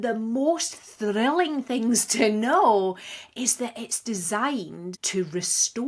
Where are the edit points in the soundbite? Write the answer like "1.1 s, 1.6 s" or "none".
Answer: 4.9 s